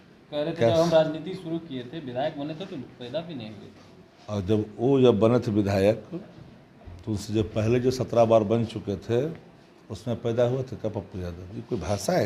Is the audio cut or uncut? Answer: uncut